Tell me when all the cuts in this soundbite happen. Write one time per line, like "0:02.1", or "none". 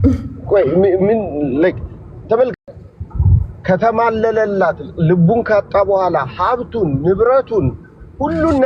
none